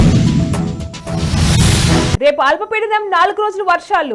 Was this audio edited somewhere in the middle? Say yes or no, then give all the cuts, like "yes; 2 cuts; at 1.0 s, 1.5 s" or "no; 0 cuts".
yes; 1 cut; at 2.2 s